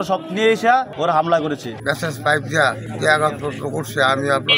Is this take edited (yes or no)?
yes